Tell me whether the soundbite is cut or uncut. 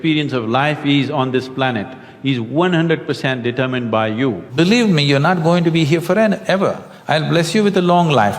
cut